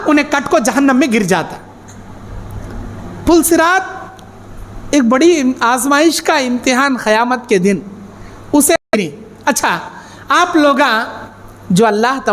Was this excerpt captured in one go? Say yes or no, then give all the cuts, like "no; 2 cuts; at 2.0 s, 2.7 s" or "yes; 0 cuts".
no; 1 cut; at 8.9 s